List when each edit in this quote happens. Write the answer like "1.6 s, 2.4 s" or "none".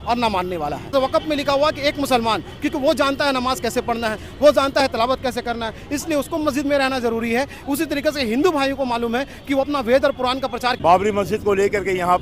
0.9 s, 10.8 s

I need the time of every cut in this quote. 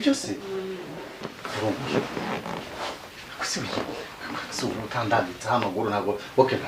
1.4 s

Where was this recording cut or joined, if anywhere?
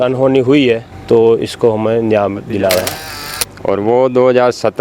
0.9 s, 3.1 s

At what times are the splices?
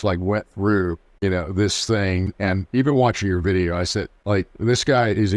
1.1 s, 2.3 s, 4.2 s

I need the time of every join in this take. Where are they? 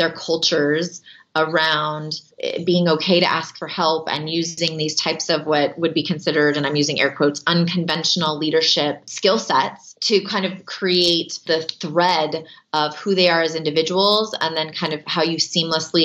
2.3 s, 9.1 s, 9.9 s, 11.4 s

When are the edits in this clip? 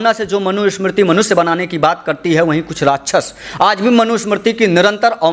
none

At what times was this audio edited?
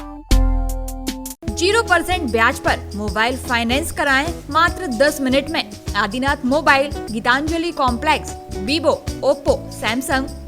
none

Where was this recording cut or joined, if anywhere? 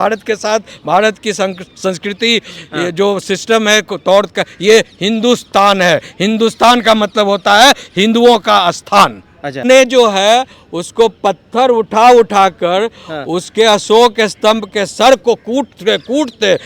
9.6 s

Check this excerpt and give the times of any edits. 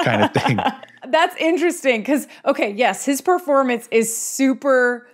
0.9 s

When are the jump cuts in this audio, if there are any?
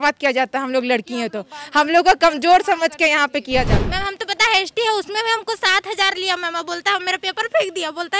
3.8 s

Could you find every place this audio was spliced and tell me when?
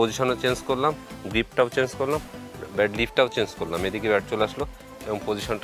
none

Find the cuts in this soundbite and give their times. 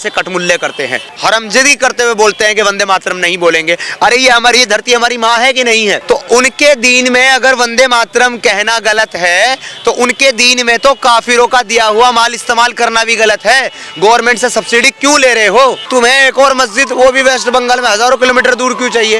1.0 s, 6.0 s, 15.8 s

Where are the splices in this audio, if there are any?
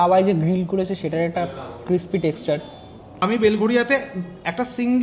3.1 s

